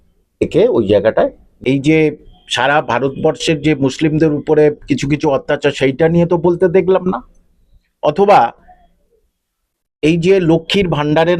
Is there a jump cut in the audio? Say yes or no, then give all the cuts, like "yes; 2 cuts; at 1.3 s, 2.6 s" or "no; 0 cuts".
yes; 1 cut; at 1.4 s